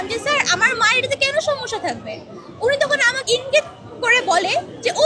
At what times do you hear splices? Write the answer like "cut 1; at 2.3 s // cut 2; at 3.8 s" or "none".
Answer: cut 1; at 3.2 s